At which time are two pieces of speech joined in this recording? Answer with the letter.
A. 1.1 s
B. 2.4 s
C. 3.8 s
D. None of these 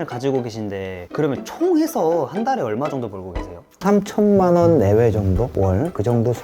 C